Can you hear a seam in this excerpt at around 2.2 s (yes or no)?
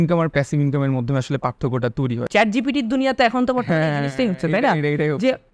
yes